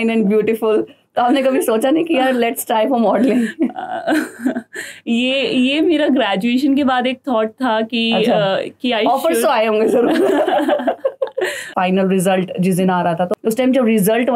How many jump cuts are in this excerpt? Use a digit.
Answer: 2